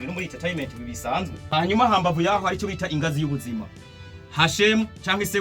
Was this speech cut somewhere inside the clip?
yes; 1 cut; at 1.4 s

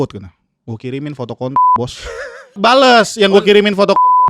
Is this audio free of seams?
no; 1 cut; at 2.6 s

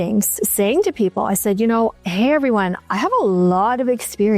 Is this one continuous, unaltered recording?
no; 1 cut; at 2.8 s

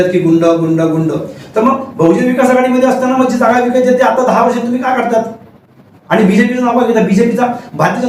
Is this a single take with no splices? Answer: yes; 0 cuts

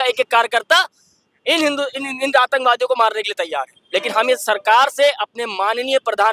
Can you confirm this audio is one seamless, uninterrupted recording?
yes; 0 cuts

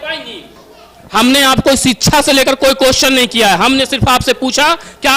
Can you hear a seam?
no; 0 cuts

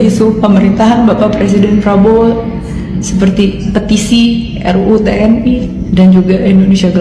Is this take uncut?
yes; 0 cuts

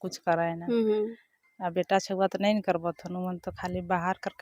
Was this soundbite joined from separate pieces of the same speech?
no; 0 cuts

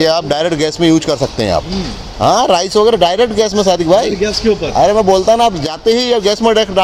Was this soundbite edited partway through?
no; 0 cuts

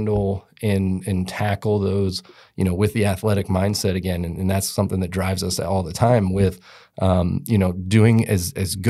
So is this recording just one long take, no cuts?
yes; 0 cuts

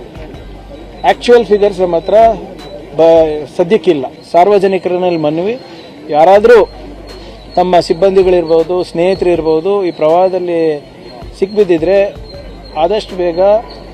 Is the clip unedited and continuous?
no; 1 cut; at 4.1 s

